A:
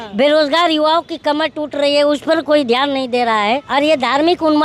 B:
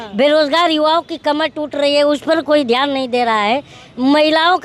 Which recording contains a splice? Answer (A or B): A